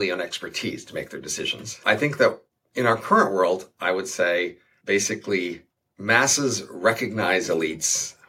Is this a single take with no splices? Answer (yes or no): no